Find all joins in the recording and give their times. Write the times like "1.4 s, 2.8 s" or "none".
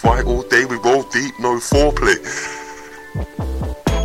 3.1 s